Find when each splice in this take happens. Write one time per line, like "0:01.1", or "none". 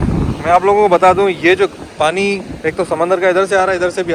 none